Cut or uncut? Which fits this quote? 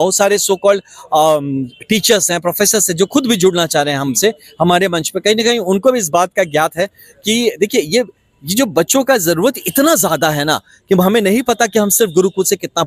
uncut